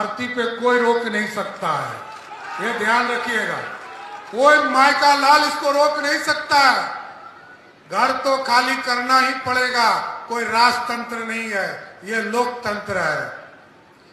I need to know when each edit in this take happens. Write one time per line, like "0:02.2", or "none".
none